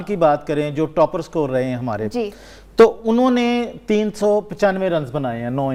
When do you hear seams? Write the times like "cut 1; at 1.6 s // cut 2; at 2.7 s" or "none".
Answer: none